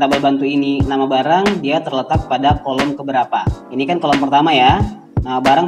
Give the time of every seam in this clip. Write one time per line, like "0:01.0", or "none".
0:03.6